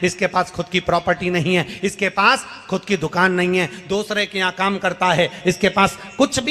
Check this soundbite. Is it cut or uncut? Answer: cut